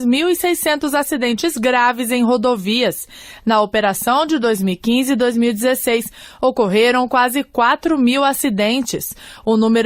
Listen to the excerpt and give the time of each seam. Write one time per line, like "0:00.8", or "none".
none